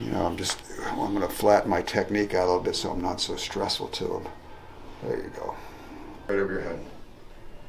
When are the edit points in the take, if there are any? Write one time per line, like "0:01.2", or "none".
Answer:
0:06.3